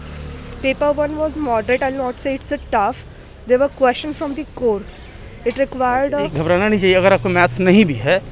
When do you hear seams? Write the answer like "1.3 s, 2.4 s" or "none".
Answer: 6.2 s